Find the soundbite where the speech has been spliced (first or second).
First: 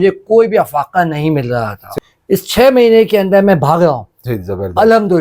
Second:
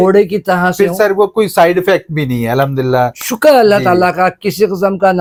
first